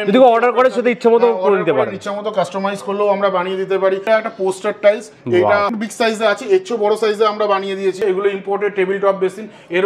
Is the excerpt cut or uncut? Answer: cut